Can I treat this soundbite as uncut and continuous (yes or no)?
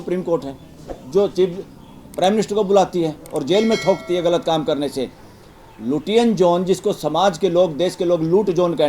yes